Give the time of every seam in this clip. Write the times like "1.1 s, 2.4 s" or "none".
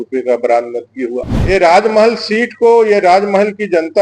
1.3 s